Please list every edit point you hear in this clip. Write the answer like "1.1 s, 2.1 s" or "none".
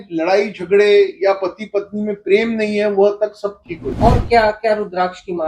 3.4 s